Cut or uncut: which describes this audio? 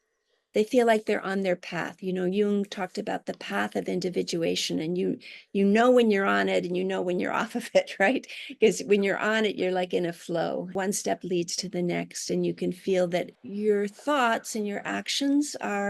cut